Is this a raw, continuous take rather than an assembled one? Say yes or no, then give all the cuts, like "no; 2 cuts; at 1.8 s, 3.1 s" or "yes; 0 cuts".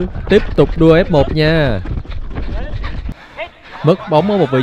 no; 1 cut; at 3.1 s